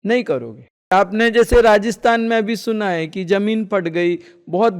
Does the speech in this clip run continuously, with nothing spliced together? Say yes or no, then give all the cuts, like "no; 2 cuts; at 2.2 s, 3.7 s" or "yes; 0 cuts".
no; 1 cut; at 0.9 s